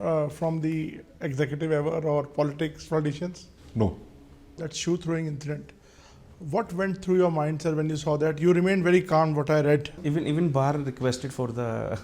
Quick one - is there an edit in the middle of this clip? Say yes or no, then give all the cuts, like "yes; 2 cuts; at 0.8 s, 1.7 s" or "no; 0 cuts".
yes; 2 cuts; at 4.6 s, 9.9 s